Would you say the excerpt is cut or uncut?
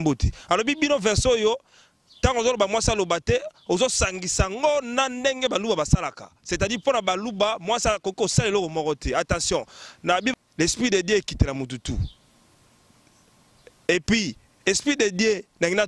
cut